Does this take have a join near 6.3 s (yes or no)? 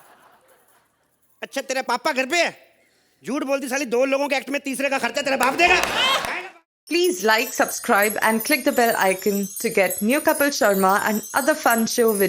yes